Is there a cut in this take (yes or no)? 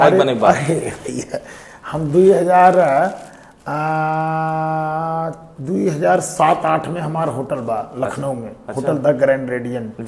no